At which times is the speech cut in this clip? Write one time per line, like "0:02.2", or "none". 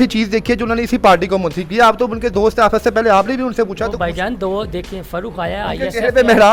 none